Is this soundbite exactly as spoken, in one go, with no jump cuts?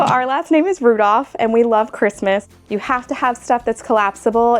no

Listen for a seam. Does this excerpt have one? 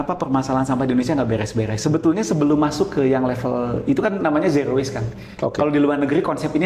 no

